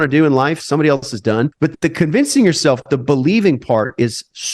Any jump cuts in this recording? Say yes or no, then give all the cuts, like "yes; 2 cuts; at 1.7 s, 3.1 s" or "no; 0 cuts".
yes; 1 cut; at 1.5 s